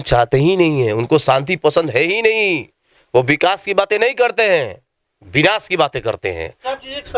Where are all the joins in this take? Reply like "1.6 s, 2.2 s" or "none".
none